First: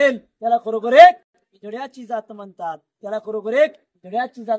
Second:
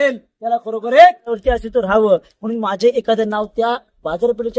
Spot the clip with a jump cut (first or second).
second